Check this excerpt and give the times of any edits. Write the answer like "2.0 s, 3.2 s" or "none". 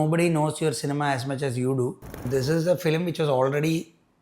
2.2 s